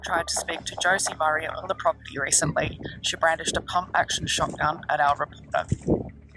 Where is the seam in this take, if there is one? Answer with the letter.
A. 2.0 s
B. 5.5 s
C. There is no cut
C